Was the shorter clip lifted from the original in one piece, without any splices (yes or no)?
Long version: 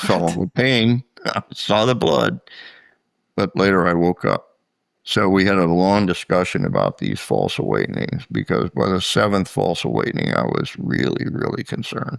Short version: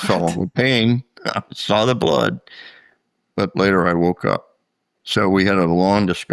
yes